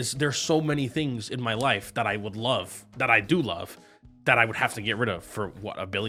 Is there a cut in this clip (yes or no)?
no